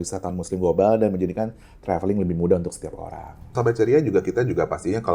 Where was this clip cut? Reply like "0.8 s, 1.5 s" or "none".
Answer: 3.5 s